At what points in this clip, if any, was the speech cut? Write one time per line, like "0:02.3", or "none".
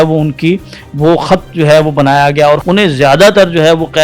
0:02.6

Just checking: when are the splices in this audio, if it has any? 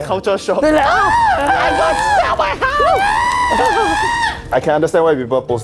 0:04.4

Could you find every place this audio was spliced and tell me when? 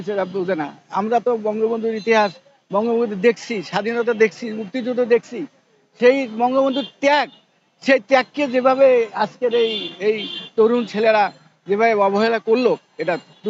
none

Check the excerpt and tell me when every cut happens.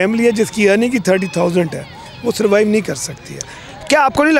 none

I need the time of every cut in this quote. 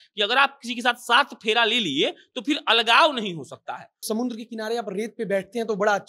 0:04.0

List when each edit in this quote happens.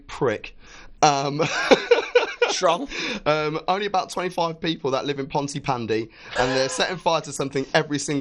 none

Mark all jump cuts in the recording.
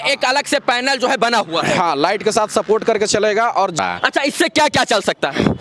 0:03.8

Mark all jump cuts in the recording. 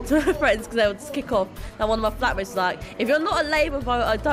none

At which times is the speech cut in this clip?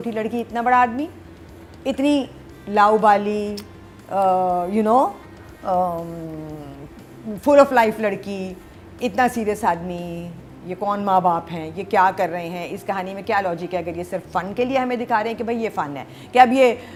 none

